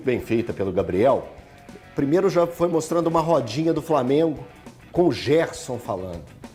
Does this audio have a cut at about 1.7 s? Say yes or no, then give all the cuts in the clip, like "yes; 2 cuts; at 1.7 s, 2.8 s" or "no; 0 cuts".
no; 0 cuts